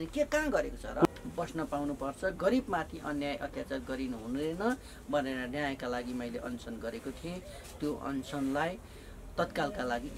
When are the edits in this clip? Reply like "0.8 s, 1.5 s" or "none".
1.0 s